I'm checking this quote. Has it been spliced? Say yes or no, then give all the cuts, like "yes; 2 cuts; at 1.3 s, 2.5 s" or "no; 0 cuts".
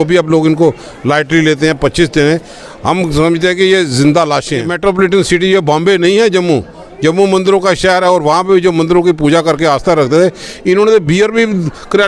yes; 1 cut; at 4.7 s